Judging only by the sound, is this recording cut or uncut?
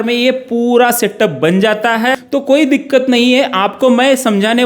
cut